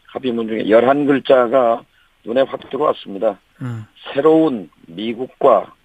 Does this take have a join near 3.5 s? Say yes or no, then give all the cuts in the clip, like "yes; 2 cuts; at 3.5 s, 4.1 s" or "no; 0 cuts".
yes; 1 cut; at 3.5 s